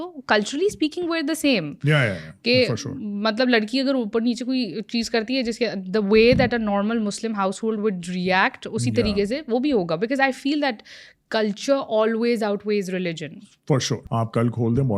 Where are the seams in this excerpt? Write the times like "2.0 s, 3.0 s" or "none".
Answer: 14.0 s